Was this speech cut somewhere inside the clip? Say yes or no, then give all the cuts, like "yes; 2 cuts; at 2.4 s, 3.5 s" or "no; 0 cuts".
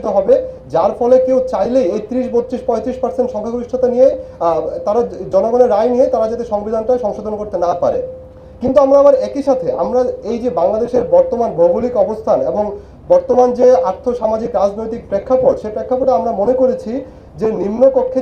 no; 0 cuts